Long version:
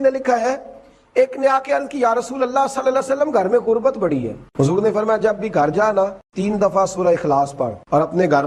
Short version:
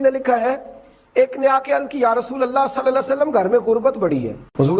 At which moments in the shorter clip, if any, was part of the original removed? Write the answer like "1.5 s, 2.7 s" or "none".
none